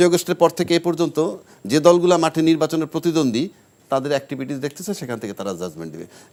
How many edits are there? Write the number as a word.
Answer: zero